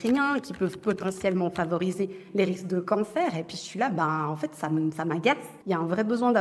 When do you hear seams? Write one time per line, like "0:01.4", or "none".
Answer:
0:05.5